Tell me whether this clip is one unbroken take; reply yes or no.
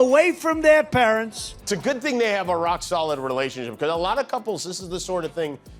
no